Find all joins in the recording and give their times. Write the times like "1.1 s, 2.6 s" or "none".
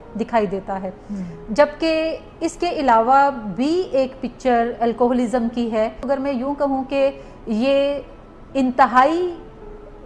6.1 s